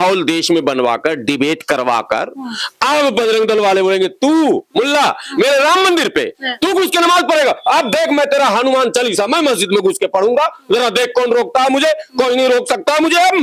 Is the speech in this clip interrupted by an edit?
no; 0 cuts

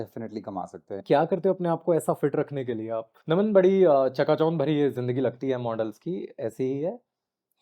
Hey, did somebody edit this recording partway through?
yes; 2 cuts; at 1.0 s, 3.1 s

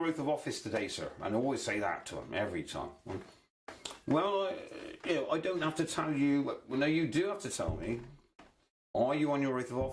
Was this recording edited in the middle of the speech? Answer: yes; 1 cut; at 5.3 s

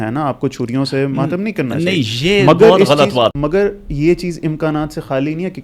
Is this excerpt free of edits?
no; 1 cut; at 3.4 s

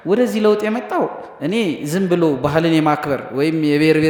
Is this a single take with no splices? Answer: yes; 0 cuts

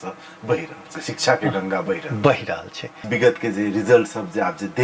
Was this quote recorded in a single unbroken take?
no; 1 cut; at 3.0 s

